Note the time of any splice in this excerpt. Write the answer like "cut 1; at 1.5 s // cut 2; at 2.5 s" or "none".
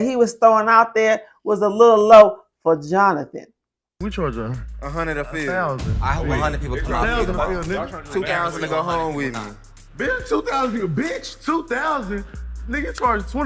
none